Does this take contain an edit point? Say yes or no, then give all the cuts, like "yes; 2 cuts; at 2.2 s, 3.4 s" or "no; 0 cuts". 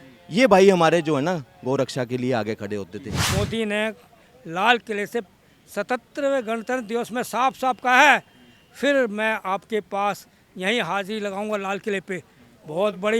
yes; 1 cut; at 3.2 s